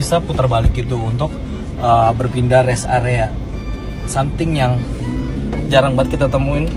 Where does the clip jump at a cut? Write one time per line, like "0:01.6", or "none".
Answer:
none